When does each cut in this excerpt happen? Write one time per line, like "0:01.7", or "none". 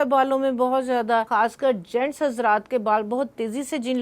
0:01.3